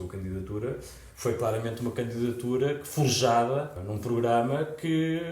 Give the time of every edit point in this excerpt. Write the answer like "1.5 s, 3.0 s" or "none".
3.8 s